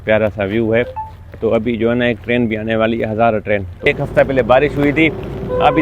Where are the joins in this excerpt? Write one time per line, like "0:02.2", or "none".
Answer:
0:03.9